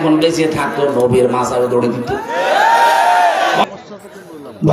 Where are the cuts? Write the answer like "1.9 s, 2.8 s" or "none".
3.6 s